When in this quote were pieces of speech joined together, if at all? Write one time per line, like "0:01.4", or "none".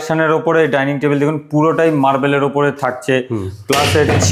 none